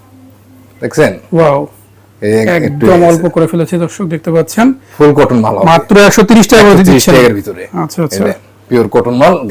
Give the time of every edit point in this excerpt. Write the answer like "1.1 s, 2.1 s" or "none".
none